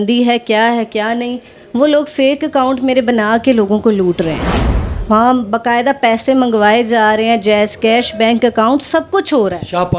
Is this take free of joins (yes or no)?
yes